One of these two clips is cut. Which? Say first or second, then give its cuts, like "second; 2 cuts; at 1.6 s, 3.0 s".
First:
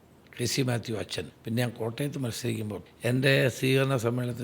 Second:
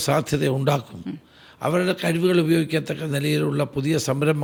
first; 2 cuts; at 1.3 s, 2.8 s